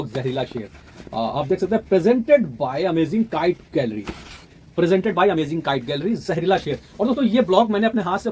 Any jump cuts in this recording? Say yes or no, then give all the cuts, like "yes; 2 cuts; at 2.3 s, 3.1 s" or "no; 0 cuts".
no; 0 cuts